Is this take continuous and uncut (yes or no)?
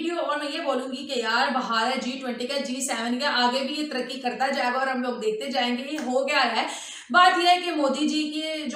yes